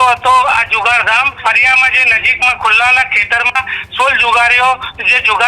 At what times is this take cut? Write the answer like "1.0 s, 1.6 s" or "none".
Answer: 1.4 s